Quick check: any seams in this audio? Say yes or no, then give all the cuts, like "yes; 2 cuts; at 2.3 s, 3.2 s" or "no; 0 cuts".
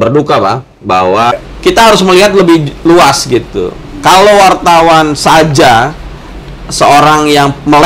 yes; 1 cut; at 1.5 s